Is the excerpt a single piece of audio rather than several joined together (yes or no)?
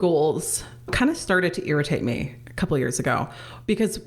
no